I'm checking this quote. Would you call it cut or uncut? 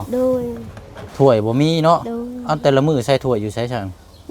cut